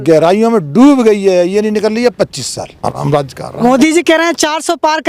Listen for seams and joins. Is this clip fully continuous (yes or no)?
no